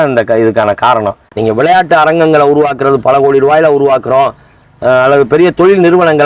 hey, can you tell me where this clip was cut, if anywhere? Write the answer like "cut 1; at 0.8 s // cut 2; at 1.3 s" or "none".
cut 1; at 1.2 s